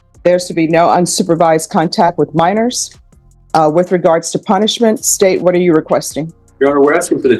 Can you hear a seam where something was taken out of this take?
no; 0 cuts

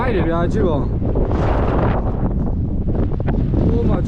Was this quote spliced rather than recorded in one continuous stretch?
no; 0 cuts

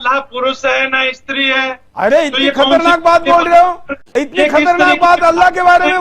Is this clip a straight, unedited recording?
no; 1 cut; at 4.1 s

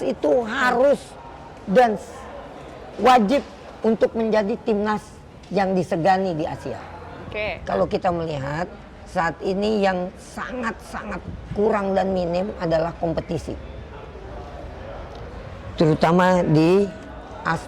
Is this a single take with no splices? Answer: no; 1 cut; at 7.6 s

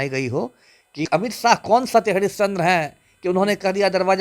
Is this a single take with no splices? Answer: no; 1 cut; at 1.1 s

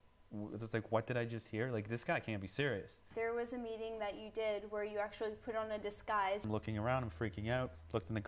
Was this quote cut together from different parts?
yes; 2 cuts; at 3.0 s, 6.4 s

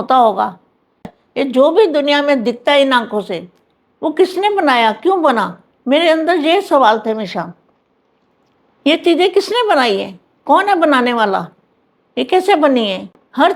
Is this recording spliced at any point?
yes; 1 cut; at 1.1 s

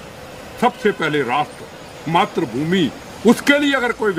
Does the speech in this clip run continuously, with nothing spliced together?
yes; 0 cuts

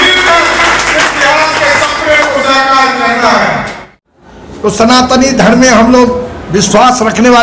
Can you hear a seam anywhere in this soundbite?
yes; 1 cut; at 4.0 s

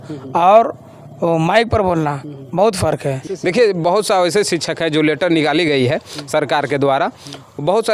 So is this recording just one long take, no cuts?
no; 1 cut; at 3.3 s

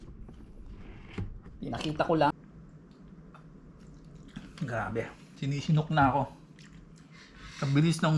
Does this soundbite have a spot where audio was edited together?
yes; 1 cut; at 2.3 s

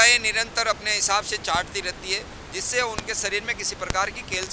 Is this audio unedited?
yes; 0 cuts

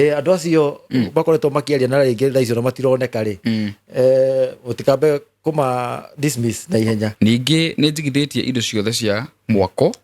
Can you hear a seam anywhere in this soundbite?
yes; 1 cut; at 7.1 s

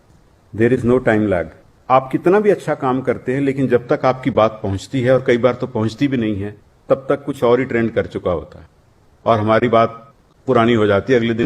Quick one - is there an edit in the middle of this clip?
yes; 1 cut; at 1.7 s

